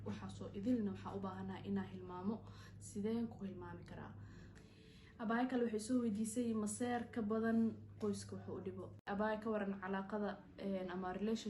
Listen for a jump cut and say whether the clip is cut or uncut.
cut